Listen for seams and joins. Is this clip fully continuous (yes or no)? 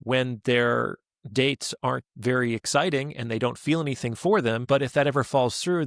no